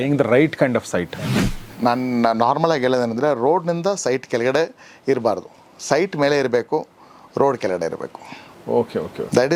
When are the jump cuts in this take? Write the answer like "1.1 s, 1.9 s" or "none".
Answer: 1.4 s